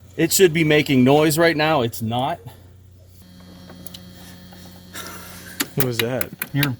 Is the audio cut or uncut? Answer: cut